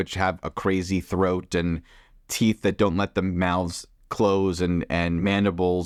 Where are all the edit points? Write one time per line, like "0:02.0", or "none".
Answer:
none